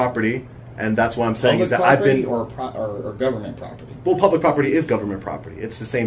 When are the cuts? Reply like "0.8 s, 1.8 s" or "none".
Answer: none